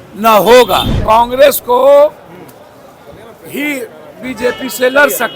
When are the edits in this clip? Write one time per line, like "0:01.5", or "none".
0:00.9